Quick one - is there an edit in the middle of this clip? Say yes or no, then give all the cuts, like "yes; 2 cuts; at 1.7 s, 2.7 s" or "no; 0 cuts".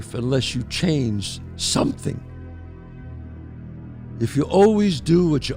no; 0 cuts